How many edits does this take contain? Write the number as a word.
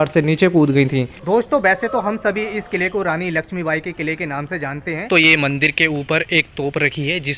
two